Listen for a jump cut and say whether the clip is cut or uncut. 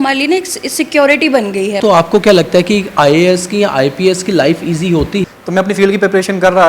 cut